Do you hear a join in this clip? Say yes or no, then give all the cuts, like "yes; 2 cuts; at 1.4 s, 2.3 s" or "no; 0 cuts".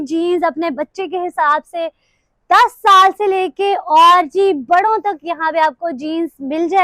no; 0 cuts